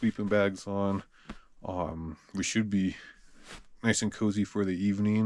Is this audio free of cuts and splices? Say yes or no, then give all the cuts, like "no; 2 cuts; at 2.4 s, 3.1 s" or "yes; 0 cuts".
yes; 0 cuts